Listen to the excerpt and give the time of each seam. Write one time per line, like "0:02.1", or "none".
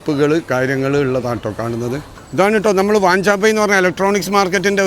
0:02.2